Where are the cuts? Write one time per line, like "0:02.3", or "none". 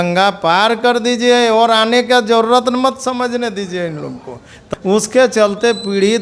0:04.6